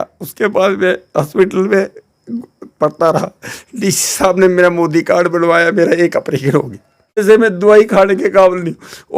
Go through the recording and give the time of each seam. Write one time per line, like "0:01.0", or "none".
0:07.2